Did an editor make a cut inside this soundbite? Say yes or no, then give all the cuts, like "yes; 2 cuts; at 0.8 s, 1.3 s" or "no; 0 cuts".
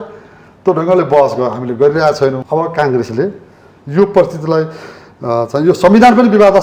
yes; 1 cut; at 2.4 s